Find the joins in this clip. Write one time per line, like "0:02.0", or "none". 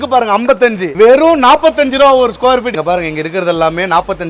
0:00.9
0:02.7